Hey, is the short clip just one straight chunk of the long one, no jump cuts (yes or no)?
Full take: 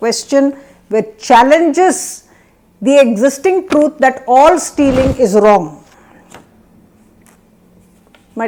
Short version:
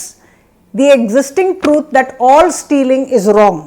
yes